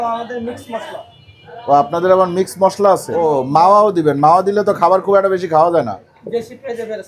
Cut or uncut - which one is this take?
cut